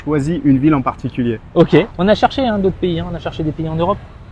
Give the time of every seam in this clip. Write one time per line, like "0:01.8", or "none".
0:01.9